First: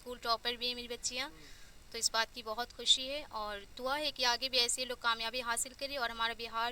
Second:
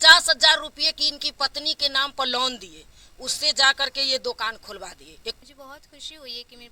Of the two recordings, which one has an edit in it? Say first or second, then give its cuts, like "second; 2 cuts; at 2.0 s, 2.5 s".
second; 1 cut; at 5.4 s